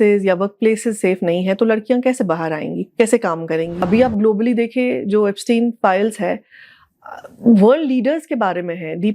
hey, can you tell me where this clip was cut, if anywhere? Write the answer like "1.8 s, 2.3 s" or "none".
3.9 s